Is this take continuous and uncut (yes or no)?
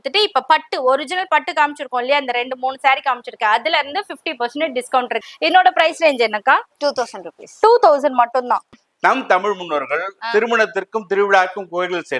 no